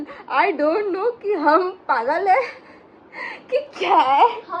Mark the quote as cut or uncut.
uncut